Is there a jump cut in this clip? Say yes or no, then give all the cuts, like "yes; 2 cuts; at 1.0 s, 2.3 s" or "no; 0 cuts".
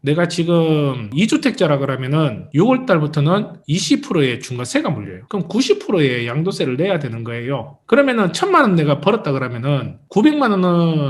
no; 0 cuts